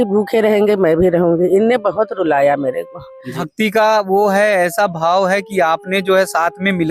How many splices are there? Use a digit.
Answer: 1